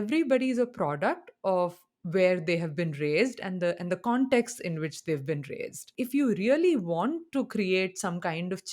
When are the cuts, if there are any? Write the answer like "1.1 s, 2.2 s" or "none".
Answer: 5.9 s